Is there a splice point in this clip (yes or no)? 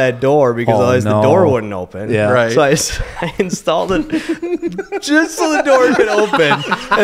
no